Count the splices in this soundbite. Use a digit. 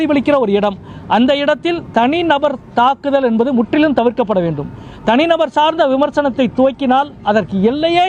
0